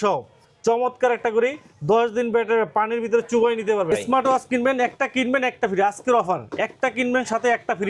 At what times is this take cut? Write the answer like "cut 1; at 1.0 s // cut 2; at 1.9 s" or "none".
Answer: cut 1; at 3.9 s